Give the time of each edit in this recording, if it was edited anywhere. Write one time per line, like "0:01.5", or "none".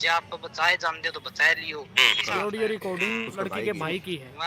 0:02.2